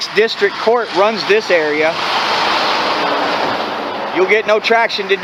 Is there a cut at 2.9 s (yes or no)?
no